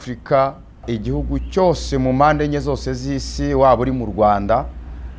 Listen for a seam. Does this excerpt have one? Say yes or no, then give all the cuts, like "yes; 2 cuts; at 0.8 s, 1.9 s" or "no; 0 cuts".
yes; 1 cut; at 0.9 s